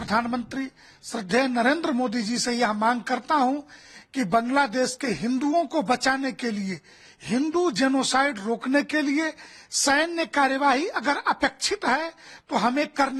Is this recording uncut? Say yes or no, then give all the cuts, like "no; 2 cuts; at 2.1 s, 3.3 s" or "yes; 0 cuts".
yes; 0 cuts